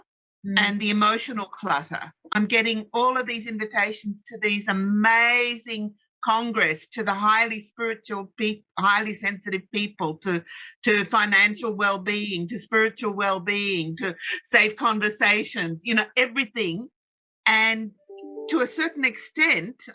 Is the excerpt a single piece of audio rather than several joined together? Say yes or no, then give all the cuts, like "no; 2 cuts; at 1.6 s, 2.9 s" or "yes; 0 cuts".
yes; 0 cuts